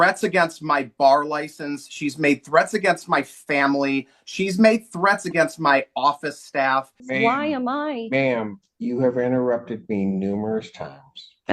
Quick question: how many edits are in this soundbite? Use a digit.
1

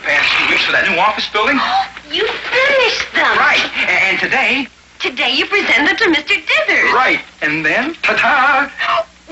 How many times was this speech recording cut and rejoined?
0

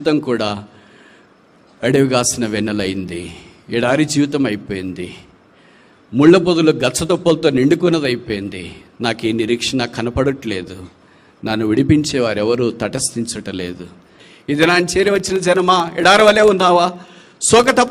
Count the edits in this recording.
1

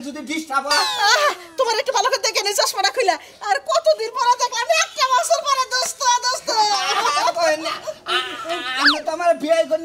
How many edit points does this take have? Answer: 0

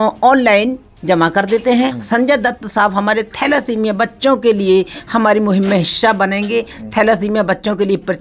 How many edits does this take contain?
1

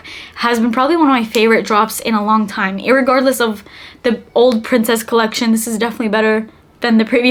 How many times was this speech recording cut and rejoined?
0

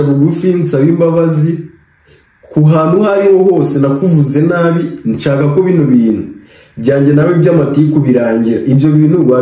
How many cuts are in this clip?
0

